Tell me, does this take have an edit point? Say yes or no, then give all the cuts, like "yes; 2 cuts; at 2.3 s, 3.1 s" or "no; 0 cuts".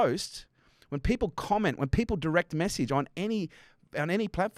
no; 0 cuts